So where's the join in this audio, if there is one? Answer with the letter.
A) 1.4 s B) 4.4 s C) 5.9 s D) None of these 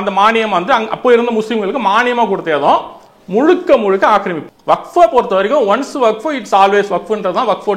B